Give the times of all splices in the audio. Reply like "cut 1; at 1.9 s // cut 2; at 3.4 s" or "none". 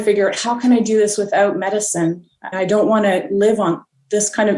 none